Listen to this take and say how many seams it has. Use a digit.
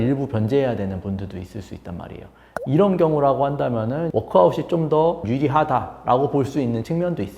2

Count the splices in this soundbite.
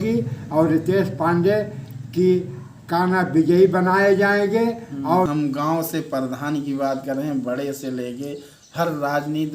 1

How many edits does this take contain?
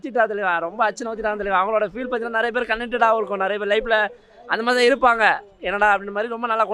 0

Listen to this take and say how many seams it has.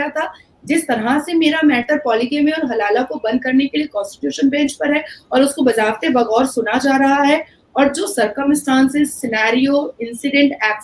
0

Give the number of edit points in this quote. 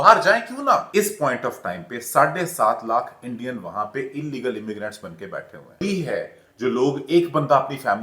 2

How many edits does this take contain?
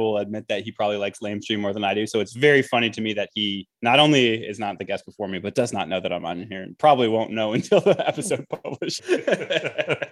1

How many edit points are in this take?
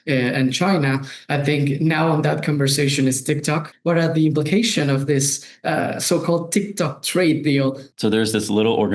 2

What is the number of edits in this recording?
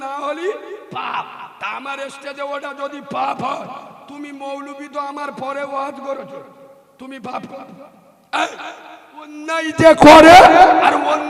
0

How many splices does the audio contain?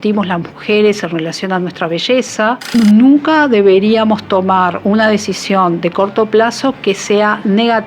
1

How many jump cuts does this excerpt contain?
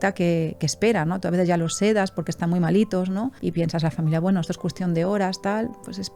0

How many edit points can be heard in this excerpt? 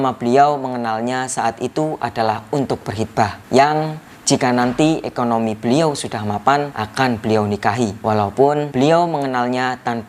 4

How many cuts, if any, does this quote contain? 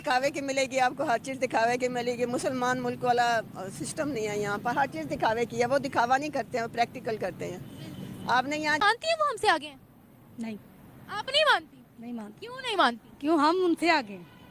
1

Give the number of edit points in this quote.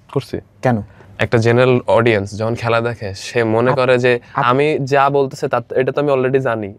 1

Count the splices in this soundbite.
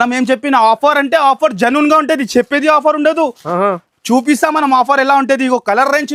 0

